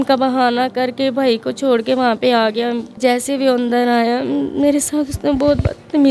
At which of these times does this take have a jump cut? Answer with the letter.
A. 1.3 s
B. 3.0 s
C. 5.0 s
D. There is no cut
B